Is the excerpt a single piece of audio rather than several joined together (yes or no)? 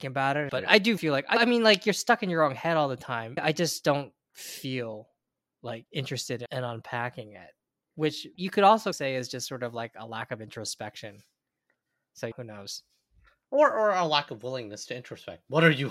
no